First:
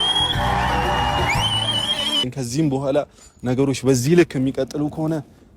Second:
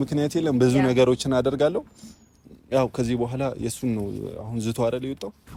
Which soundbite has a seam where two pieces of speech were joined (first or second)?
first